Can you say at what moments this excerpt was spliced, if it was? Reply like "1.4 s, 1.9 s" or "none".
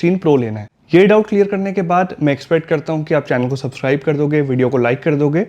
none